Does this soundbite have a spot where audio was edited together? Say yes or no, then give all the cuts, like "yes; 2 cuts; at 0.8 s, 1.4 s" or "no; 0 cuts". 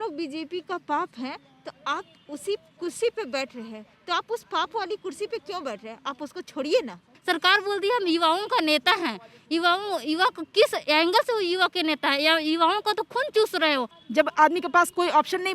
yes; 2 cuts; at 7.1 s, 14.0 s